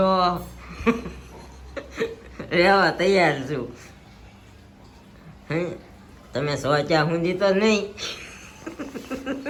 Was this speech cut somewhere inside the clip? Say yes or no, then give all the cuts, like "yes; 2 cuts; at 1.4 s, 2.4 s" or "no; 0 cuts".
no; 0 cuts